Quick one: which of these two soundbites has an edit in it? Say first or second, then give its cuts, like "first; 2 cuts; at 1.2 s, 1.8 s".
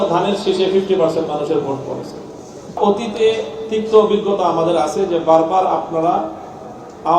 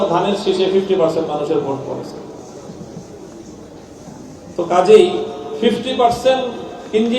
first; 1 cut; at 2.8 s